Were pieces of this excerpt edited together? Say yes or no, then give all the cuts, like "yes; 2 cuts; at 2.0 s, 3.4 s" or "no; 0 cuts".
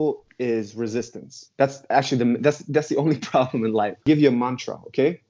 yes; 1 cut; at 4.0 s